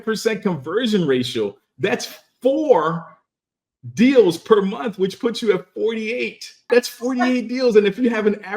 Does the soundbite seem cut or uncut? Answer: cut